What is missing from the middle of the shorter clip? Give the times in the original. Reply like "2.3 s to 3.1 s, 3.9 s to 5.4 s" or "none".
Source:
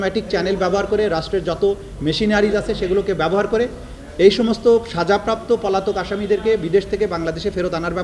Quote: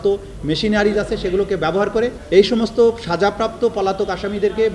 3.8 s to 4.1 s